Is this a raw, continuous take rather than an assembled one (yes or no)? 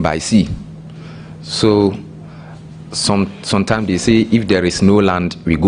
yes